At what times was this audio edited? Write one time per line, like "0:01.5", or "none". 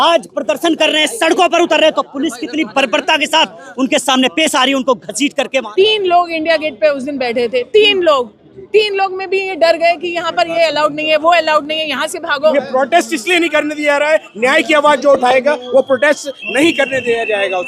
0:05.7
0:12.5